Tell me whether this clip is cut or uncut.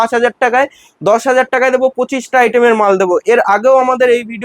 uncut